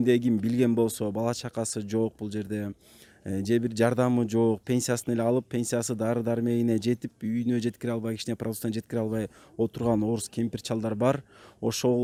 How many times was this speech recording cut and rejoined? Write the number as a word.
zero